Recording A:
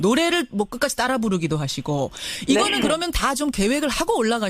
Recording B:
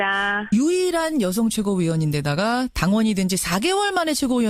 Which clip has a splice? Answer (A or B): B